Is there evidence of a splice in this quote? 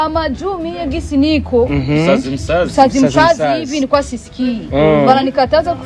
no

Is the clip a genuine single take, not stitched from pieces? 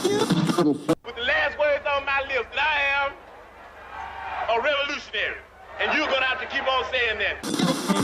yes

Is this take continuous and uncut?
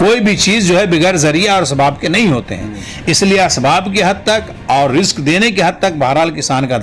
yes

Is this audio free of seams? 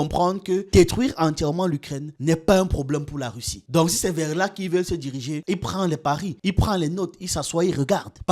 yes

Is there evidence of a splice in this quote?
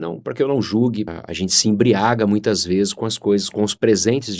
yes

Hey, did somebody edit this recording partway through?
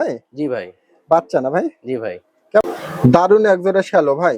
yes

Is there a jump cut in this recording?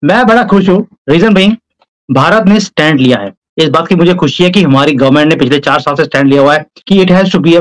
yes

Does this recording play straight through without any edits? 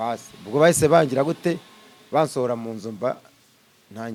yes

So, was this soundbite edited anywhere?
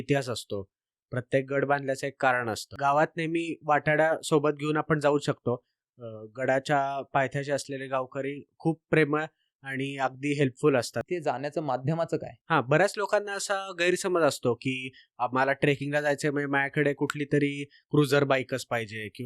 yes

